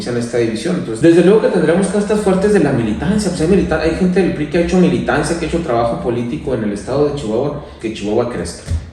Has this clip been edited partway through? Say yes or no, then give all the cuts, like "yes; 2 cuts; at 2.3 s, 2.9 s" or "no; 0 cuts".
yes; 2 cuts; at 1.0 s, 7.7 s